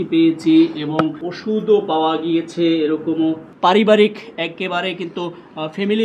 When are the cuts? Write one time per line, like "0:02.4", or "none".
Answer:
0:01.3
0:03.5